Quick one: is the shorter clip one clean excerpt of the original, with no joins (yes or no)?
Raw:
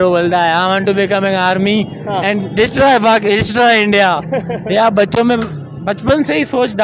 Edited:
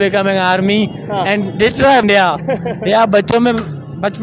no